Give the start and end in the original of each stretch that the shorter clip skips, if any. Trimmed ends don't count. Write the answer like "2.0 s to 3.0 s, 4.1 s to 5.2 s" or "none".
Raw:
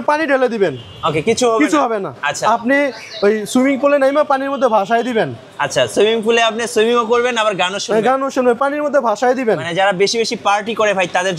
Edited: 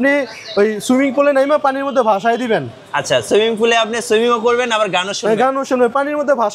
none

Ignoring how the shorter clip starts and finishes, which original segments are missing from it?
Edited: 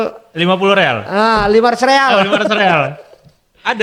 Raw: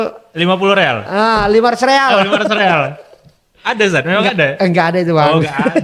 none

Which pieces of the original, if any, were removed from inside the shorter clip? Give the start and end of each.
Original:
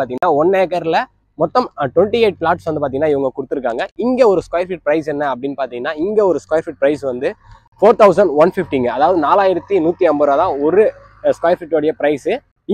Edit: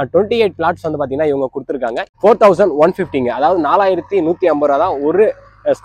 3.9 s to 7.7 s

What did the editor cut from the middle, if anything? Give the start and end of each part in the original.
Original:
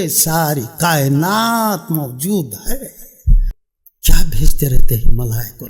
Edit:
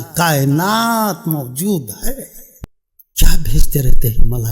3.2 s to 3.4 s

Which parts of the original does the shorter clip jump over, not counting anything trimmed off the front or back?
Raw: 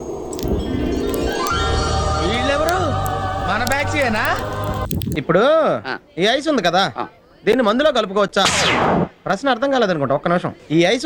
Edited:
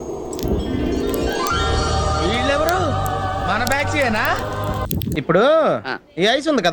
none

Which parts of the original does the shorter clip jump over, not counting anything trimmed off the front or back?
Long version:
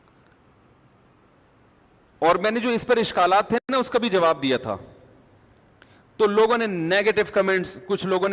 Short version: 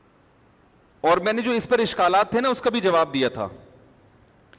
3.6 s to 3.7 s

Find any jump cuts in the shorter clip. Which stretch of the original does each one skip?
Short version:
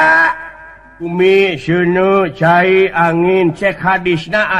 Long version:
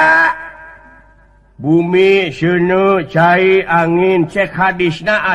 1.1 s to 1.8 s

